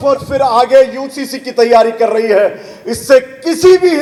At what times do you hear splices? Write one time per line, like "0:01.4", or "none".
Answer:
none